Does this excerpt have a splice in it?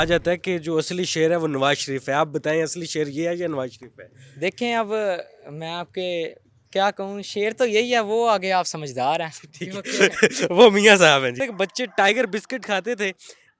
yes; 1 cut; at 11.4 s

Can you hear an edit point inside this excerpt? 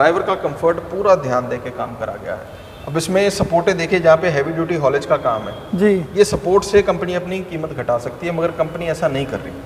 no; 0 cuts

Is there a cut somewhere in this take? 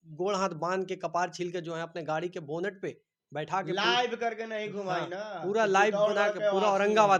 no; 0 cuts

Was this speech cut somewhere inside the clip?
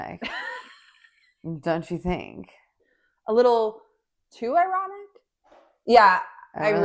no; 0 cuts

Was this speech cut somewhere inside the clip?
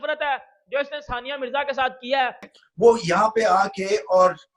yes; 1 cut; at 2.6 s

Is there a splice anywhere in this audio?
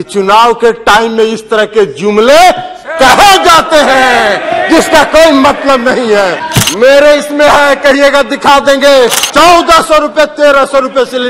yes; 2 cuts; at 6.4 s, 9.2 s

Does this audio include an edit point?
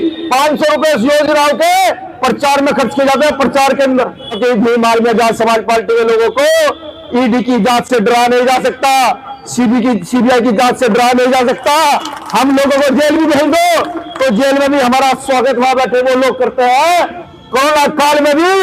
yes; 2 cuts; at 4.4 s, 17.2 s

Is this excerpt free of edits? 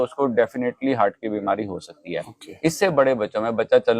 yes; 0 cuts

